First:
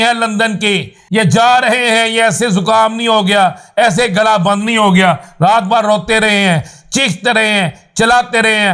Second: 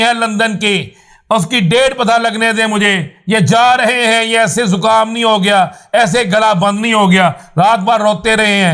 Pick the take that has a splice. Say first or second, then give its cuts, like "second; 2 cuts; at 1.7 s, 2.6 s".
first; 1 cut; at 1.0 s